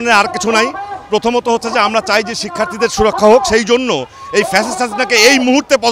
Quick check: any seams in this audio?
no; 0 cuts

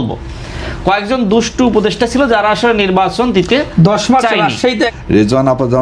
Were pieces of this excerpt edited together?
yes; 1 cut; at 4.9 s

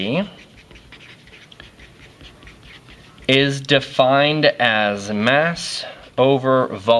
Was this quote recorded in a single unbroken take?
yes; 0 cuts

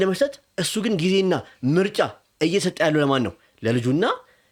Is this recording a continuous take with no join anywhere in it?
yes; 0 cuts

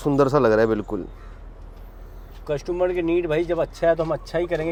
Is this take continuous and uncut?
yes; 0 cuts

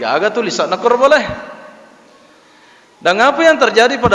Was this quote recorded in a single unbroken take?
yes; 0 cuts

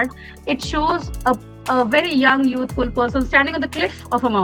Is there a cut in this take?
no; 0 cuts

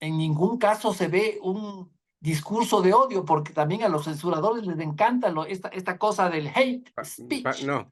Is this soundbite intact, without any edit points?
yes; 0 cuts

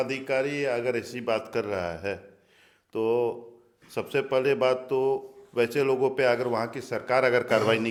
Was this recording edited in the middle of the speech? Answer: no; 0 cuts

